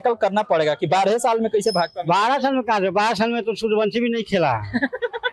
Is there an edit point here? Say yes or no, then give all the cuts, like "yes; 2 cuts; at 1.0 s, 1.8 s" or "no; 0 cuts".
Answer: no; 0 cuts